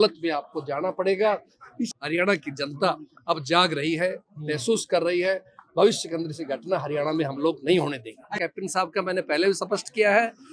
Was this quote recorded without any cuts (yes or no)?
no